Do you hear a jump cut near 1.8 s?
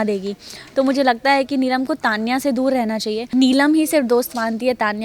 no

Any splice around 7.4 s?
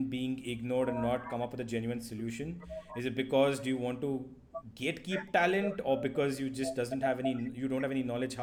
no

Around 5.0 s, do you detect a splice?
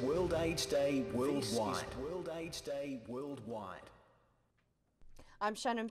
yes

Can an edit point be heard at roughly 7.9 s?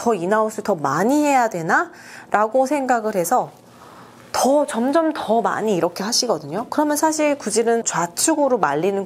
yes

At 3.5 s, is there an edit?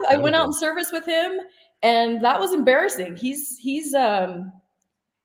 no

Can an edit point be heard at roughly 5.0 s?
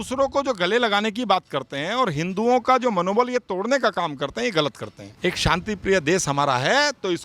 yes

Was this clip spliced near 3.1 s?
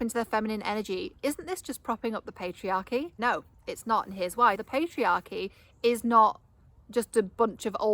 yes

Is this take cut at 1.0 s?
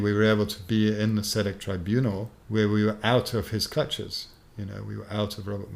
no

